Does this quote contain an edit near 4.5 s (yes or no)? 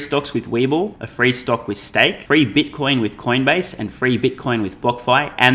no